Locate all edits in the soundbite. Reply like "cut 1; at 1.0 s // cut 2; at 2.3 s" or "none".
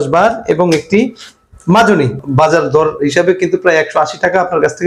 cut 1; at 2.2 s